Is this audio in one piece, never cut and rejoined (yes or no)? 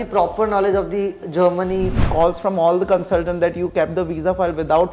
no